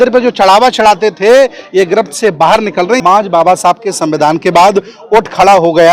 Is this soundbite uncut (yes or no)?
no